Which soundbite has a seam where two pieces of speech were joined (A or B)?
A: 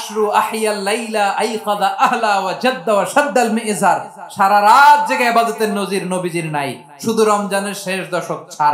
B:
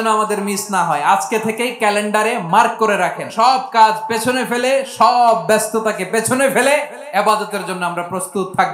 B